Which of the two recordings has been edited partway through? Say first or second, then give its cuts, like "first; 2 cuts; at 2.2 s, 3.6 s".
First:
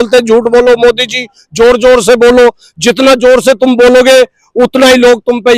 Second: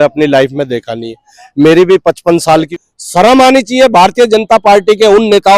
second; 1 cut; at 2.8 s